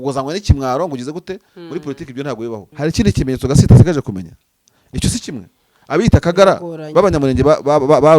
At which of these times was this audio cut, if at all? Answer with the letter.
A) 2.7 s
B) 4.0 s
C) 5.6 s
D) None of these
A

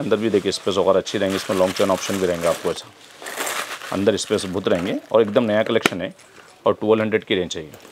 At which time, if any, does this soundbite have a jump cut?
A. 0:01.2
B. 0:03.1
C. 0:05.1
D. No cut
D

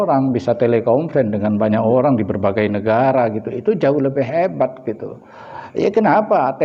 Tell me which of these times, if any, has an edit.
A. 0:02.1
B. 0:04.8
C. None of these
C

